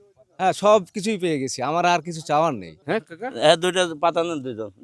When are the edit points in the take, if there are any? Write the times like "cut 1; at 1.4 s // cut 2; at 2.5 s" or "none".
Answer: cut 1; at 2.7 s

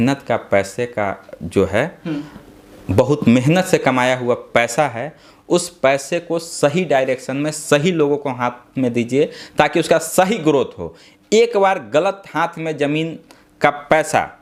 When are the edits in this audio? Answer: none

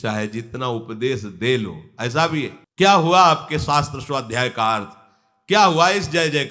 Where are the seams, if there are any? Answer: cut 1; at 2.6 s

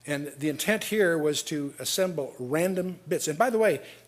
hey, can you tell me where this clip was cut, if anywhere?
cut 1; at 2.3 s

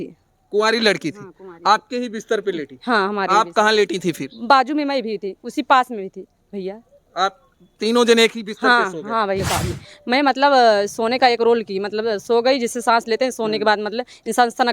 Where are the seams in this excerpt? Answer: cut 1; at 9.4 s

